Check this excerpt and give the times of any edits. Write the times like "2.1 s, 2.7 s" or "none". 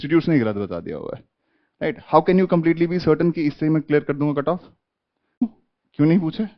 5.4 s